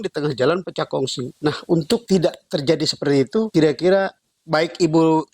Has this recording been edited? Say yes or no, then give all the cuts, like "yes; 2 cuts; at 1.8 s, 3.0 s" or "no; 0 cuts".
yes; 2 cuts; at 2.0 s, 3.5 s